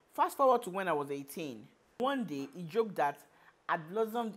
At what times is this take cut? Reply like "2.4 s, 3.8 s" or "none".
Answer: 2.0 s